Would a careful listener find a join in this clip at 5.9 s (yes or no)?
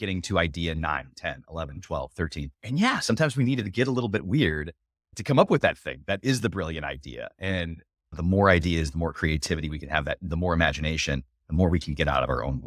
no